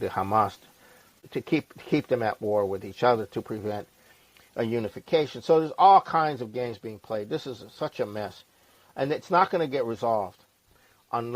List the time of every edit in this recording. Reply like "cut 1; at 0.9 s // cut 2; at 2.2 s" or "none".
cut 1; at 1.2 s

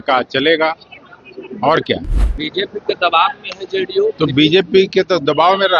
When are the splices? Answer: cut 1; at 2.2 s

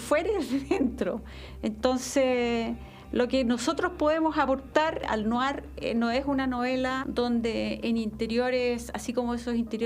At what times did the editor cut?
cut 1; at 5.1 s // cut 2; at 7.0 s

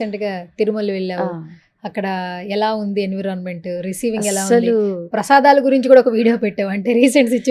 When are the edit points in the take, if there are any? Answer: none

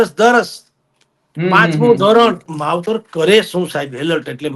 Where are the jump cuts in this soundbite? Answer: cut 1; at 2.4 s

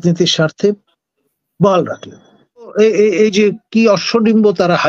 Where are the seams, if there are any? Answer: cut 1; at 2.7 s

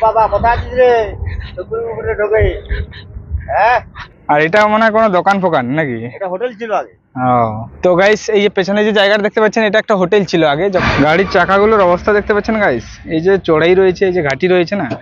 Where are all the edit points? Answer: cut 1; at 4.0 s // cut 2; at 7.7 s // cut 3; at 10.8 s

